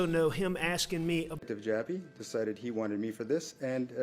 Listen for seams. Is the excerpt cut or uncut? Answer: cut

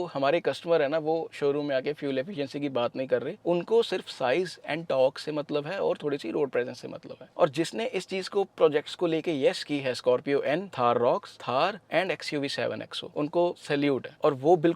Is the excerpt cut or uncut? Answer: cut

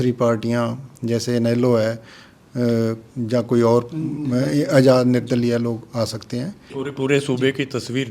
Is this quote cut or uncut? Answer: cut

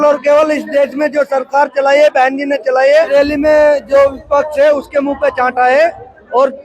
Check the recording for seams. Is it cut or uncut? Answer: cut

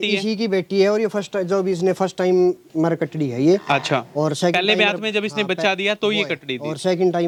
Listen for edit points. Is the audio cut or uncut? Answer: uncut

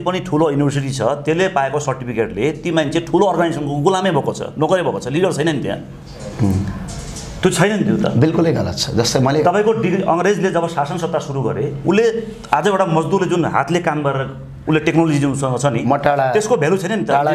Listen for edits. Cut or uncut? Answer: uncut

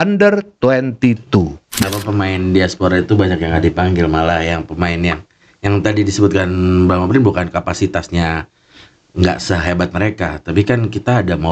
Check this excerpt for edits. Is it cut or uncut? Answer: cut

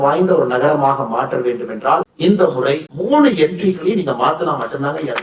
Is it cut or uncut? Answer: uncut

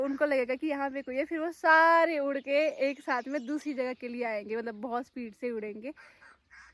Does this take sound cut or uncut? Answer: uncut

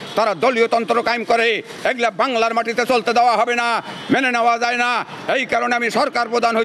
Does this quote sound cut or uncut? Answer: uncut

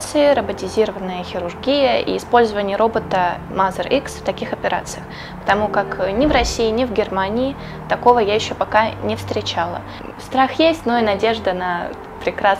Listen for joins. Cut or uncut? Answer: cut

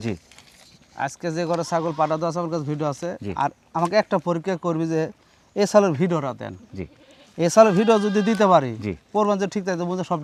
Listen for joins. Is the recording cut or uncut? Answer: uncut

